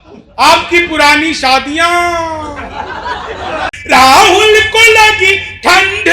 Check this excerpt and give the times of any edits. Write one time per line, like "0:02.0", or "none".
0:03.7